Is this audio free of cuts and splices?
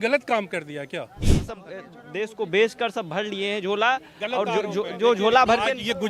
no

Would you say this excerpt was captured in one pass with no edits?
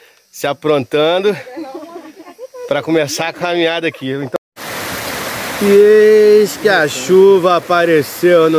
no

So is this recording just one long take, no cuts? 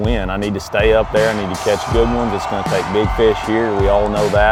yes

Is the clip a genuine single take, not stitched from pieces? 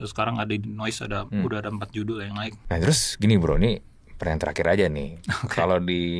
no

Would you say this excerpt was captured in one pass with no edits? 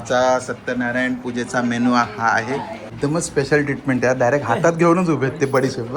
no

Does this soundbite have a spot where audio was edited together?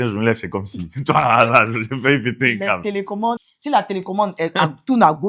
yes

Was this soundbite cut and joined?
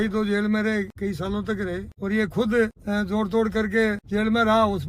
yes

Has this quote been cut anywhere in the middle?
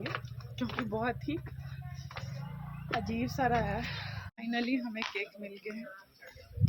yes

